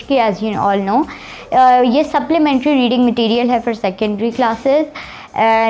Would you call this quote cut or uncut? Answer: uncut